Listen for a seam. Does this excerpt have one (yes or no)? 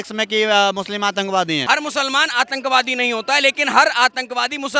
yes